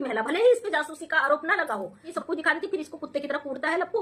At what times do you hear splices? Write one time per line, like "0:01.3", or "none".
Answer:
0:02.1